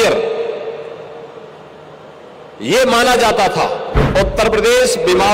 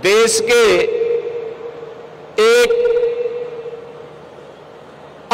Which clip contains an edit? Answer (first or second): first